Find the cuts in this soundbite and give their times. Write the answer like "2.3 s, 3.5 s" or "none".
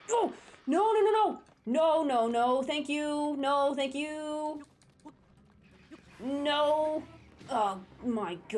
none